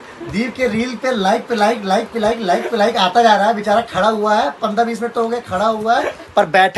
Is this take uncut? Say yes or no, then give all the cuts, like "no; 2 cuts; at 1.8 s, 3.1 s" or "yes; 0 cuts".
yes; 0 cuts